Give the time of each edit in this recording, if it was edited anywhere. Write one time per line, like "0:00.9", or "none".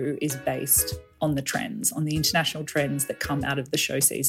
0:02.3